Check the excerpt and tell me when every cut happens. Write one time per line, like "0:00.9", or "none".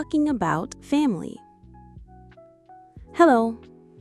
none